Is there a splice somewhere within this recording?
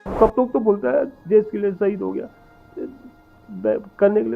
no; 0 cuts

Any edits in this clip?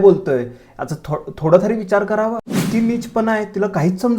yes; 1 cut; at 2.5 s

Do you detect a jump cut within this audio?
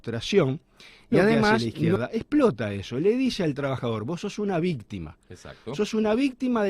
yes; 1 cut; at 2.0 s

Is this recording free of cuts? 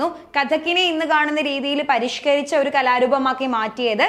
yes; 0 cuts

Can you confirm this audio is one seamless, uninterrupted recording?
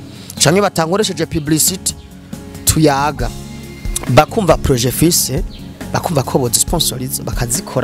yes; 0 cuts

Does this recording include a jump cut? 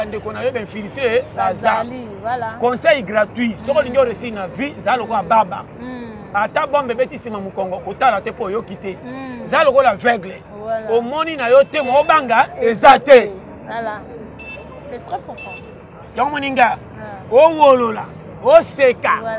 no; 0 cuts

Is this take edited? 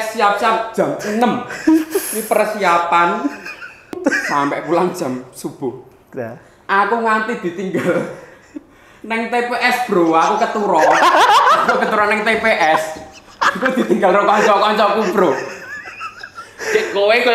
yes; 1 cut; at 4.0 s

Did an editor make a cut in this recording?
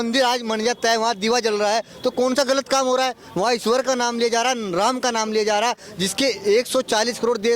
no; 0 cuts

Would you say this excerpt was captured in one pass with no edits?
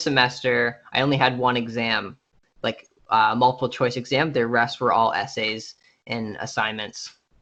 yes; 0 cuts

